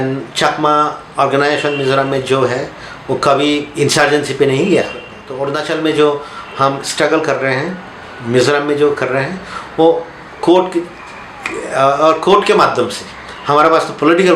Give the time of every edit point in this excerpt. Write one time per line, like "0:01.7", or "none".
0:05.2